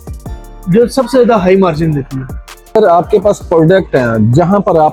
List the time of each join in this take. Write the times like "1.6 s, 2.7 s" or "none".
none